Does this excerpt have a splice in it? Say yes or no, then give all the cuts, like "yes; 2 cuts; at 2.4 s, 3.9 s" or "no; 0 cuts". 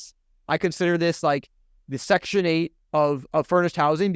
yes; 1 cut; at 2.8 s